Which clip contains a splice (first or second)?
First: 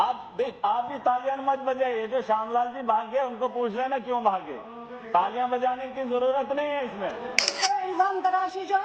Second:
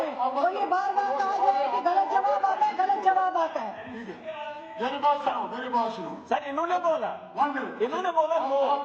first